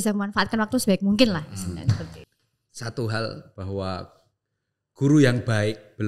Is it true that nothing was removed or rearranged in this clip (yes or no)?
no